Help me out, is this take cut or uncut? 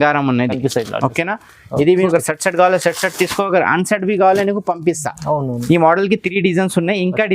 cut